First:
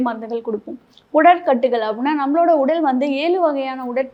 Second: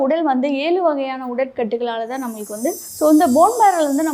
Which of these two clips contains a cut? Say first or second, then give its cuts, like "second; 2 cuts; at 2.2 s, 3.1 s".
second; 1 cut; at 2.8 s